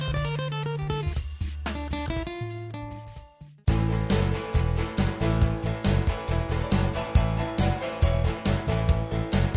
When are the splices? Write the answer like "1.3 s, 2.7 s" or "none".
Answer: none